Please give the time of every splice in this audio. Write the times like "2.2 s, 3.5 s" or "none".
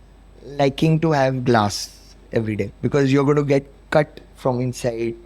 2.7 s